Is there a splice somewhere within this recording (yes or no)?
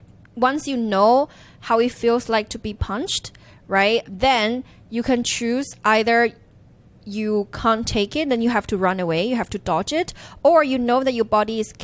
yes